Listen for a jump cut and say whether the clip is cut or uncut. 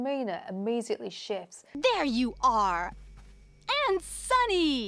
uncut